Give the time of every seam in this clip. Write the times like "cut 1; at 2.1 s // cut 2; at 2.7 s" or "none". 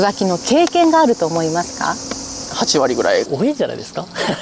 cut 1; at 3.3 s